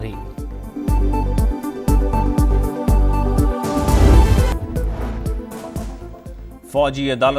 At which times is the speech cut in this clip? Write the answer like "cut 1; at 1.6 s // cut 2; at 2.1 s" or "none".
cut 1; at 4.5 s